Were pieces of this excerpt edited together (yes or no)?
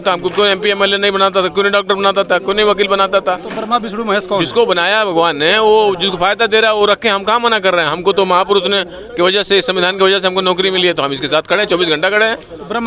no